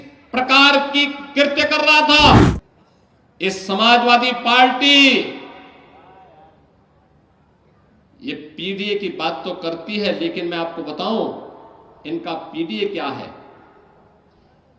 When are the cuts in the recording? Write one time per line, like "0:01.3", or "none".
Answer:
0:02.4